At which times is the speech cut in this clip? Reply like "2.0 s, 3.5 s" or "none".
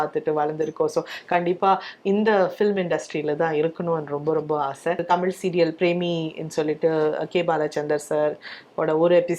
5.0 s